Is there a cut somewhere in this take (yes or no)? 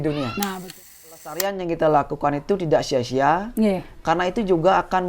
yes